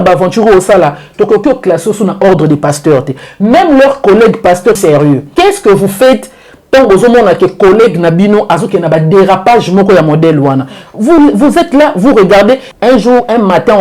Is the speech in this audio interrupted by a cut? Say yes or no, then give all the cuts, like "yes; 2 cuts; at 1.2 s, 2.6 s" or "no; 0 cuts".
yes; 2 cuts; at 4.8 s, 12.7 s